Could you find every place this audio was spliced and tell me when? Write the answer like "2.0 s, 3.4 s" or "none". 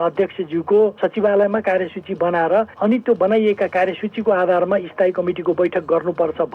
1.0 s, 2.7 s